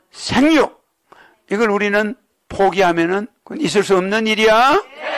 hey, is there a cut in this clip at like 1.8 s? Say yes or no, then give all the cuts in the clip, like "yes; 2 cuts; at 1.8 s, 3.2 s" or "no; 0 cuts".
no; 1 cut; at 3.4 s